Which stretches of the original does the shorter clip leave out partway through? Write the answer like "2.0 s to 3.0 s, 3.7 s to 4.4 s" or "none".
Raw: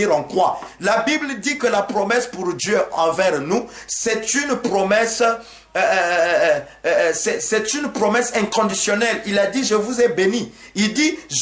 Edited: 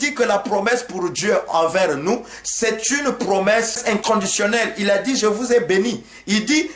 5.2 s to 8.2 s